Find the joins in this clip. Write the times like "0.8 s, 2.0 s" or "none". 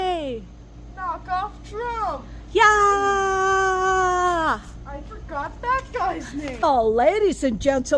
6.6 s

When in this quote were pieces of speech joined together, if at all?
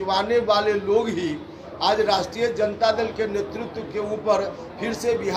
none

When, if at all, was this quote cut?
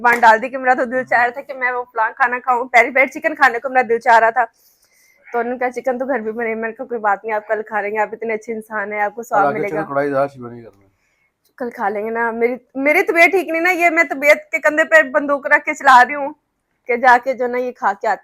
none

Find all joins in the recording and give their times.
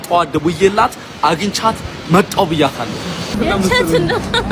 3.4 s

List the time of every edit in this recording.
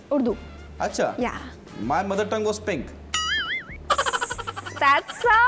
none

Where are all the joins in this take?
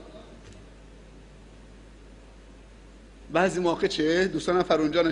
3.2 s

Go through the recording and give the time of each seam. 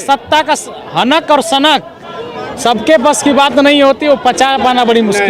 none

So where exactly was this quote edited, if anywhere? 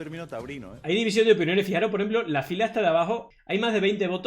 3.3 s

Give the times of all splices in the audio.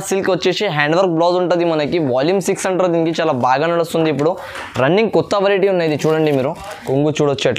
6.7 s

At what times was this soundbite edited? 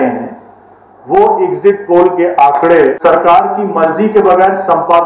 3.0 s

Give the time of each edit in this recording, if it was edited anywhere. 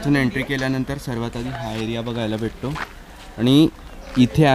none

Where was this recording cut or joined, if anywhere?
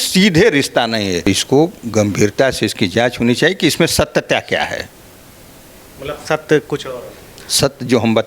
1.2 s

